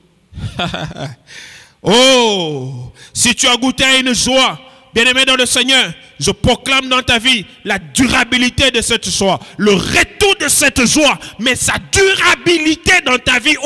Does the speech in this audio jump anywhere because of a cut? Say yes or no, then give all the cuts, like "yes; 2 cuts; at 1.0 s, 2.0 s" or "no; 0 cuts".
no; 0 cuts